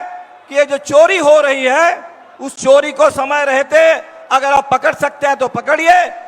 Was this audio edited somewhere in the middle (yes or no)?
no